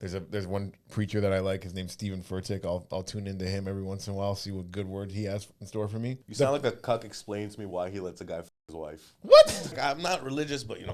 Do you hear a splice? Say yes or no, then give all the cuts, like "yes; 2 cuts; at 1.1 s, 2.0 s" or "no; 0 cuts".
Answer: yes; 2 cuts; at 6.2 s, 9.8 s